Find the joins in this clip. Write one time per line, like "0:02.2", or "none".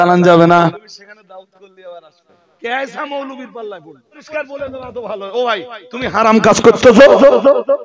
0:00.7
0:02.6
0:04.2